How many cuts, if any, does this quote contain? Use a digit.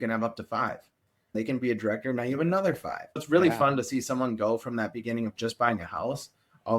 2